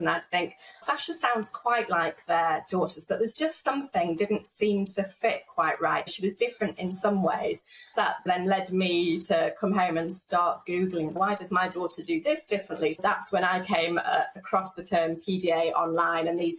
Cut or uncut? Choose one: cut